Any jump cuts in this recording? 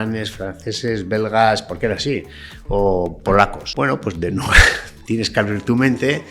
yes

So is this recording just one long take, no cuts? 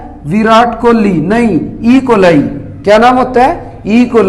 yes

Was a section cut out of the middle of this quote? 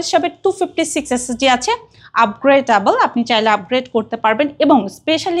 no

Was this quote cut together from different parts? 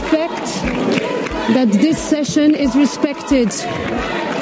yes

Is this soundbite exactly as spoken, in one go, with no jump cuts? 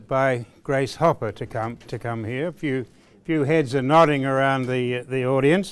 no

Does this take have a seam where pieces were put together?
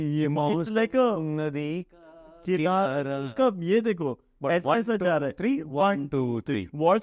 no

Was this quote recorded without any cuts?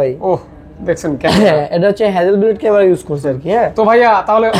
yes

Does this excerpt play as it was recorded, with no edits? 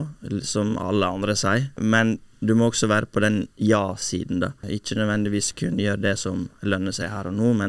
no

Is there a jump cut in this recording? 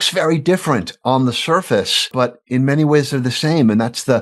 yes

